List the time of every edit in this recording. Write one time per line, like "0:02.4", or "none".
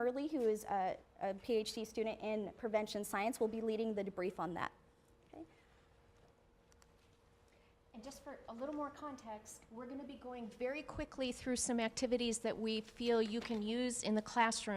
0:02.1